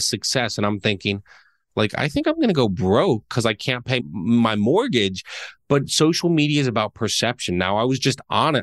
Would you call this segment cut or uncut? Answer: uncut